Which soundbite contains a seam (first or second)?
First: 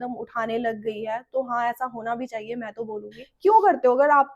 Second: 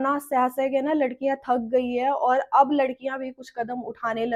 first